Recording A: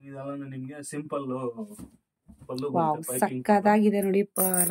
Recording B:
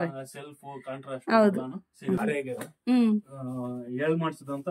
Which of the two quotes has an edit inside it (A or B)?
B